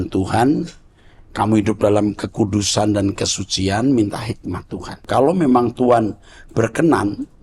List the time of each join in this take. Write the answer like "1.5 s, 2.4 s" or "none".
5.0 s